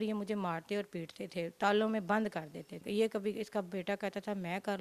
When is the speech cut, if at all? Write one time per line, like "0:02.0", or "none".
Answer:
0:02.7